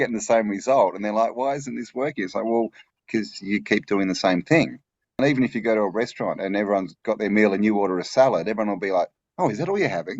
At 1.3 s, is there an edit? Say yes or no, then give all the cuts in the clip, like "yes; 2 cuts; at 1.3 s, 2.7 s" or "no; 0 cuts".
no; 1 cut; at 5.2 s